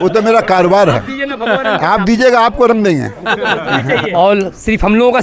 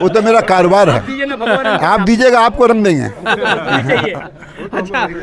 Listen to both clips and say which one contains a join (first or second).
first